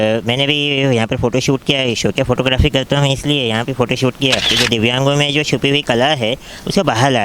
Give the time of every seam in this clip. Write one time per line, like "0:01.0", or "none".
0:04.5